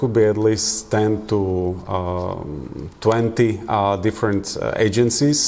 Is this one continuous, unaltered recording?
yes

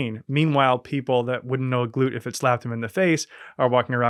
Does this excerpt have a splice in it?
no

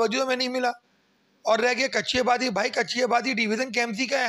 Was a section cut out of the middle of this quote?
no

